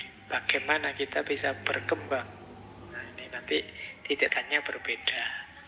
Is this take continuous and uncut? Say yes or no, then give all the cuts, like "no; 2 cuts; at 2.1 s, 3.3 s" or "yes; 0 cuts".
no; 1 cut; at 4.3 s